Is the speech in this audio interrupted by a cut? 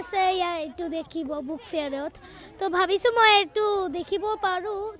no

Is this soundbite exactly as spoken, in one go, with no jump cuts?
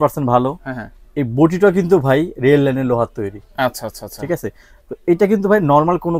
yes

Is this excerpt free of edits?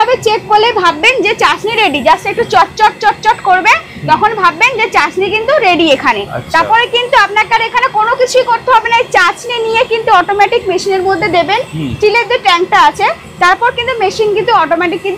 yes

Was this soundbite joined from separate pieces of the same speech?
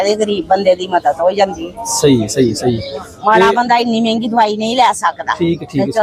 no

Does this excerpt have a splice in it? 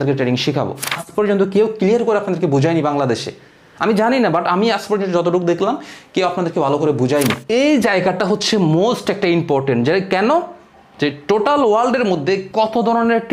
yes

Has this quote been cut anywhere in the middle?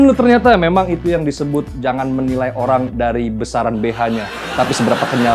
no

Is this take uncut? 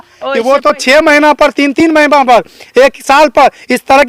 yes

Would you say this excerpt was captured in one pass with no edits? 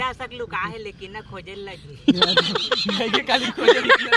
yes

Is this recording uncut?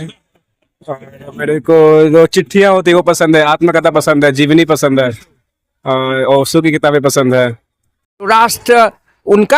no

